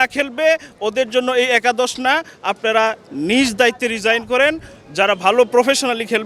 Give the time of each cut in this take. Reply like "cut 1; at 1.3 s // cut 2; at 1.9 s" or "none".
none